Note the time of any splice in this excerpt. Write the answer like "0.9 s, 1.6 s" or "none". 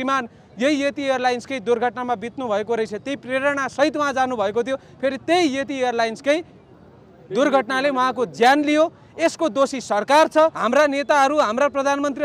10.6 s